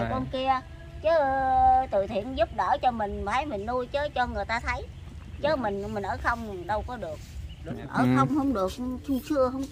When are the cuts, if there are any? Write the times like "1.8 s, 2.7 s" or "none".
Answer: 7.7 s